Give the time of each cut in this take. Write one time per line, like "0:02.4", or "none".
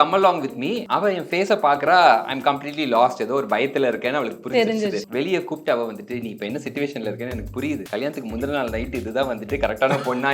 0:00.8
0:05.1
0:07.8

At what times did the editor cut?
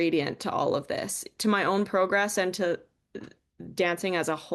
none

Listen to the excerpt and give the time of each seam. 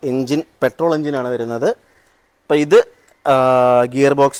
none

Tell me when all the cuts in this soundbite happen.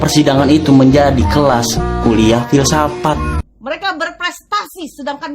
0:03.4

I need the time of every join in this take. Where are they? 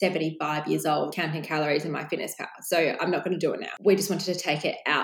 0:01.1
0:03.7

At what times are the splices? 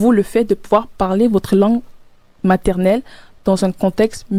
none

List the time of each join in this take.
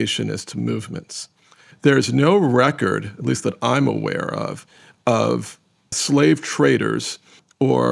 0:01.7
0:06.0

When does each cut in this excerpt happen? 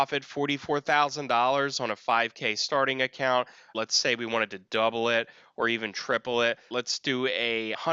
0:03.7
0:06.7

